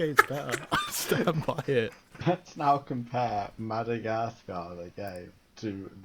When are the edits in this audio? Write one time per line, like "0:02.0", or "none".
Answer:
0:02.1